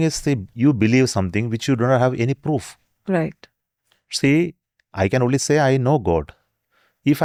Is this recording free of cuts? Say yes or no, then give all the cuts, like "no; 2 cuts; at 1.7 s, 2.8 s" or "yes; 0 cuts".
yes; 0 cuts